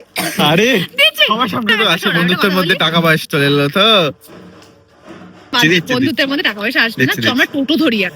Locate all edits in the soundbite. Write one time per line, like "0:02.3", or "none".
0:01.7
0:05.5